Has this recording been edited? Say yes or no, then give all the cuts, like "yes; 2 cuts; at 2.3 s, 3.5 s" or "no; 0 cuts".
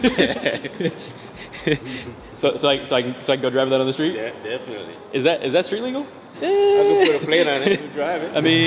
yes; 1 cut; at 6.3 s